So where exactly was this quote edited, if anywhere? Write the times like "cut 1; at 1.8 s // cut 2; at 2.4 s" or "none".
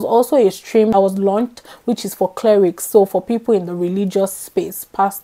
cut 1; at 0.9 s

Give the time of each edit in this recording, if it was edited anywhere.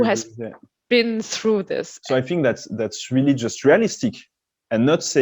cut 1; at 1.9 s

